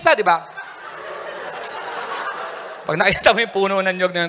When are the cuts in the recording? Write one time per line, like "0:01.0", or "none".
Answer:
none